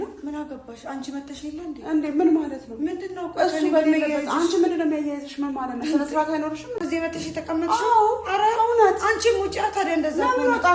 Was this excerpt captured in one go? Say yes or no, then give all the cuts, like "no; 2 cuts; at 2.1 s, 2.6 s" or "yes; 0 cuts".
no; 1 cut; at 6.8 s